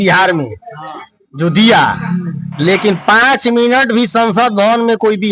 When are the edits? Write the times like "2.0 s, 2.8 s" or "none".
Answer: none

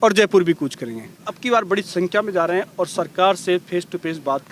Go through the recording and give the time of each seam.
1.3 s

